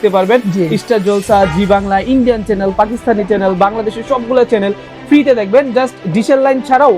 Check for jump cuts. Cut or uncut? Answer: uncut